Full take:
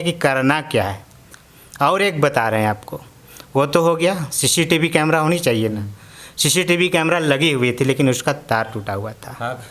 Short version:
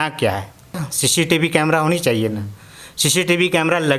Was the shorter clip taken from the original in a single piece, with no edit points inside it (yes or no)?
no